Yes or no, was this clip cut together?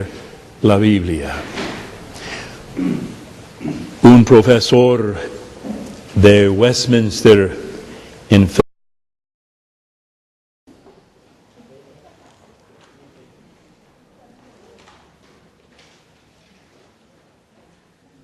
no